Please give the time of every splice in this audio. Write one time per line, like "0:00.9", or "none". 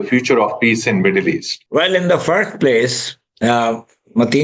none